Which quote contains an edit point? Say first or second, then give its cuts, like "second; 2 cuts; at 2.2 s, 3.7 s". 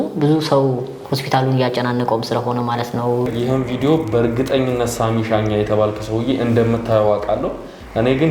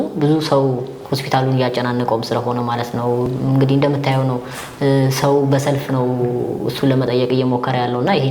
first; 1 cut; at 3.3 s